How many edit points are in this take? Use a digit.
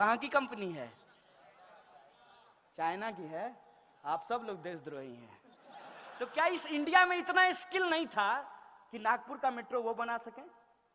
1